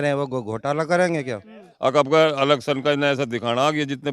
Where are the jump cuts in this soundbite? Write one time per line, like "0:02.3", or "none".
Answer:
0:01.7